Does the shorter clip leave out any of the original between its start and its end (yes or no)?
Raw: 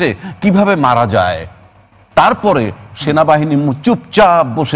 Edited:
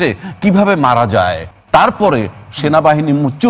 yes